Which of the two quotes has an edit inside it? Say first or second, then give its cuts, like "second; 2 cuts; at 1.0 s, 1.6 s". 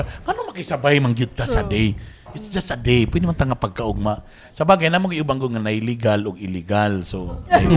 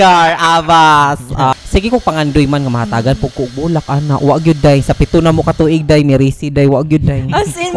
second; 1 cut; at 1.6 s